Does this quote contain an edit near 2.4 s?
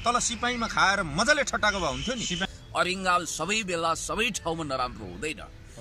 yes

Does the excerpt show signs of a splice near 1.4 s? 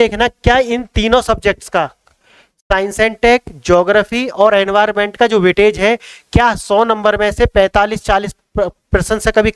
no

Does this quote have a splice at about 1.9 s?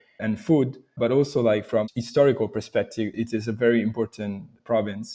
yes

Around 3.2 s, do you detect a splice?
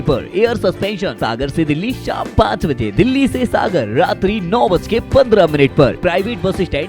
no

